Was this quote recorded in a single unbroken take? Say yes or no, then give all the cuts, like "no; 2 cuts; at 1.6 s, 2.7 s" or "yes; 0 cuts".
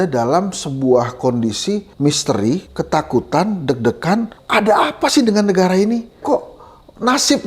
no; 4 cuts; at 1.9 s, 2.7 s, 4.4 s, 6.2 s